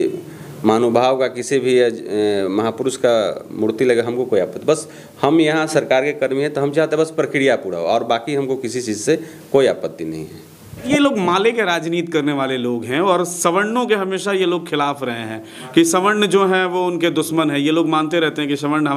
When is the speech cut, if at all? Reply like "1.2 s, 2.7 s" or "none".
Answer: 10.8 s